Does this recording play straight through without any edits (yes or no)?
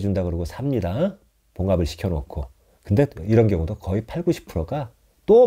yes